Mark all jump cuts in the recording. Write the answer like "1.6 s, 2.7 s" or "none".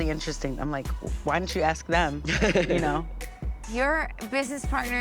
3.6 s